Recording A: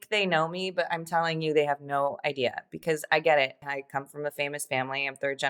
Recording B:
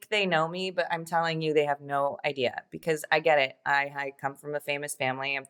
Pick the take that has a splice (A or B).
A